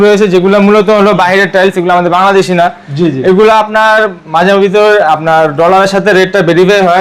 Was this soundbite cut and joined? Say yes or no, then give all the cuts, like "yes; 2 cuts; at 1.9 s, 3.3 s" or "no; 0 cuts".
no; 0 cuts